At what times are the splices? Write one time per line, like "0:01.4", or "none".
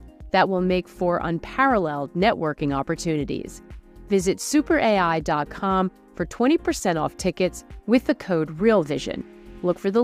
none